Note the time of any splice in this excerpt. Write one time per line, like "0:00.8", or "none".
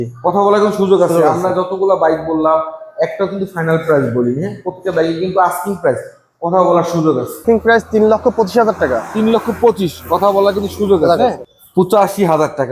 0:07.4
0:11.5